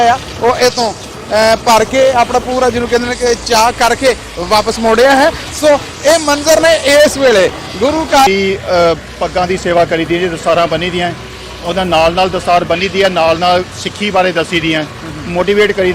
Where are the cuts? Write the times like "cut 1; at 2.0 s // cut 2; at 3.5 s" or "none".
cut 1; at 8.3 s